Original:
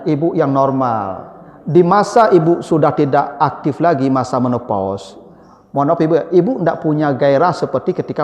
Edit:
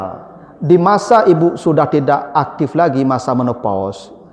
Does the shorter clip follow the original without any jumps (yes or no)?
yes